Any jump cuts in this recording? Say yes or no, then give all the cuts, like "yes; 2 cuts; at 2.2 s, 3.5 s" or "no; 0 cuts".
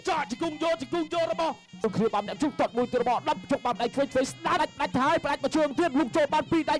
yes; 2 cuts; at 1.8 s, 4.6 s